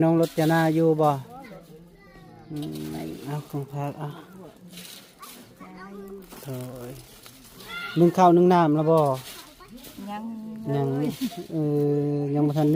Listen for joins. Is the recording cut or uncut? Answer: uncut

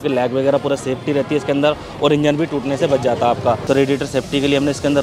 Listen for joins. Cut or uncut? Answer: cut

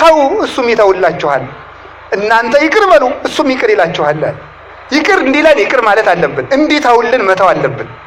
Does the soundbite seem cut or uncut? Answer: uncut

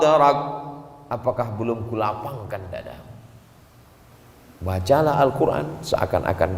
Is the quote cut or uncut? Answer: cut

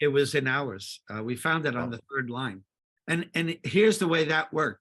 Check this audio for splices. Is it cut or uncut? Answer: uncut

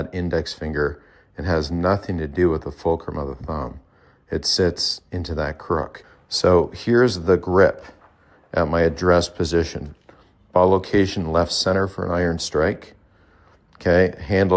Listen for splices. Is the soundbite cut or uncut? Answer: uncut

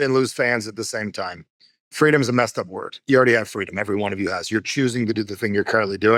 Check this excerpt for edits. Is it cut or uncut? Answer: uncut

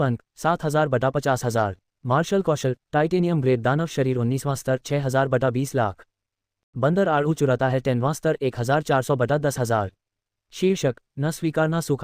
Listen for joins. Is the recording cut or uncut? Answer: cut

